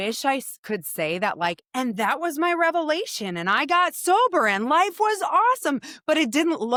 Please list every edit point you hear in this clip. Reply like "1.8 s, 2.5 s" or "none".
none